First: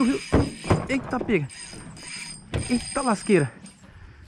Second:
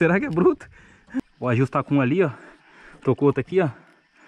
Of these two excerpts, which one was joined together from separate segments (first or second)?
second